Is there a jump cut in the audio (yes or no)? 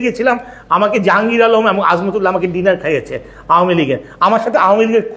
no